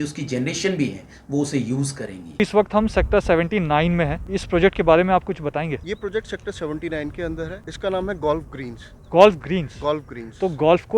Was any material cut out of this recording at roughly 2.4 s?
yes; 4 cuts; at 2.4 s, 4.3 s, 5.8 s, 7.6 s

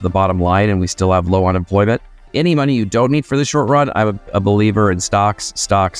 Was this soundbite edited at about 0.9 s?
no; 1 cut; at 2.3 s

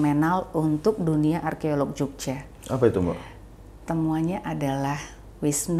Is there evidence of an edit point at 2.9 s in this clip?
no; 0 cuts

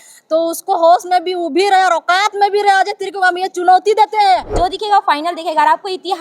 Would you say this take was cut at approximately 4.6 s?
yes; 1 cut; at 4.6 s

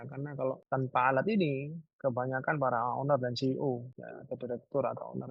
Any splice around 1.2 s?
no; 0 cuts

